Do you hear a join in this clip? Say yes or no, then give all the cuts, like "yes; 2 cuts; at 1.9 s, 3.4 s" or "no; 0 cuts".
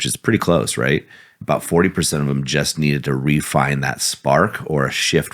yes; 1 cut; at 1.4 s